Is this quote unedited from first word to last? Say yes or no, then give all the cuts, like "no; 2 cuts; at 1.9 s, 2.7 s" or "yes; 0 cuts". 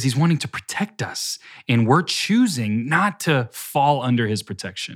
yes; 0 cuts